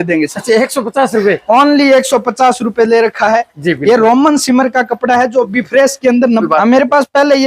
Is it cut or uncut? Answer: cut